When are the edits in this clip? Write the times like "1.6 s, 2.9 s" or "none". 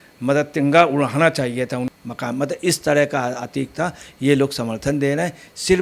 1.9 s